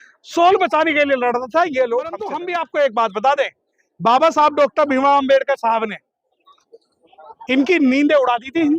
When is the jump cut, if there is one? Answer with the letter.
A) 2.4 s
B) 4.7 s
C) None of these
A